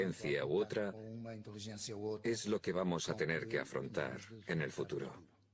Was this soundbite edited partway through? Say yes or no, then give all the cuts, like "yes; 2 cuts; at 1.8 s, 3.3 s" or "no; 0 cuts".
no; 0 cuts